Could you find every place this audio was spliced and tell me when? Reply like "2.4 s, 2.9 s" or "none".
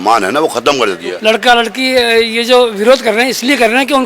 1.1 s